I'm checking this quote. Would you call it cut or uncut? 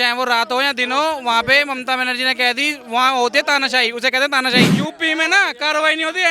cut